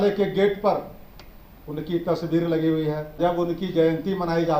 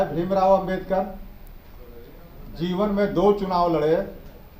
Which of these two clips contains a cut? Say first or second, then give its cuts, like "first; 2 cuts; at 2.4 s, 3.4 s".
first; 1 cut; at 3.2 s